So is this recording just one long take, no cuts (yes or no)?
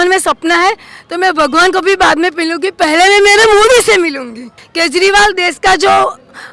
no